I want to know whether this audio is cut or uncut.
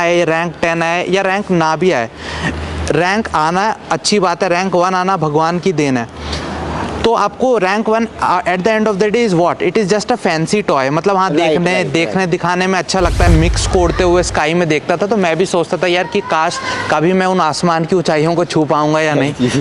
cut